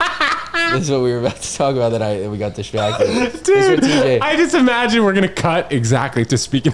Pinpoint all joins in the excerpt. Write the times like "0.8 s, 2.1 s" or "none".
none